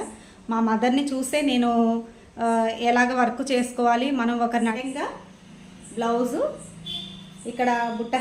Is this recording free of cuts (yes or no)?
no